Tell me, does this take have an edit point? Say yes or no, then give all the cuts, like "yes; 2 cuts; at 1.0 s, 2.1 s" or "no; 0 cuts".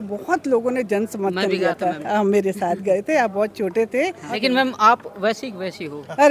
yes; 1 cut; at 4.3 s